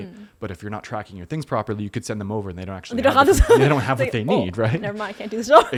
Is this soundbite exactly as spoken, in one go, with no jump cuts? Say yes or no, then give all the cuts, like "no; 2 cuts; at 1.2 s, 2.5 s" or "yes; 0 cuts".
yes; 0 cuts